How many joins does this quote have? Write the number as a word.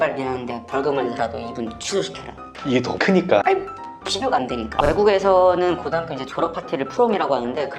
one